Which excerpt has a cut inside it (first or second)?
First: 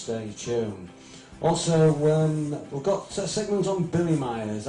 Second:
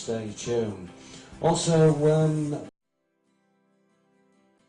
first